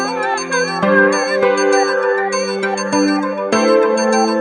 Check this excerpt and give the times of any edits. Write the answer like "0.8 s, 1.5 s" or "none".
1.0 s